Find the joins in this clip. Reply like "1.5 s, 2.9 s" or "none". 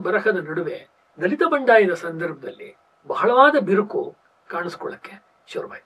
1.0 s